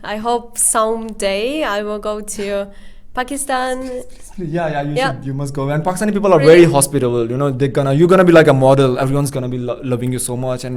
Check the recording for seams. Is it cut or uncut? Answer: uncut